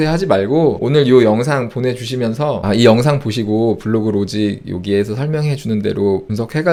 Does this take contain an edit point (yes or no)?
no